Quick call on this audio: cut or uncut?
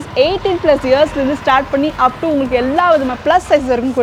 uncut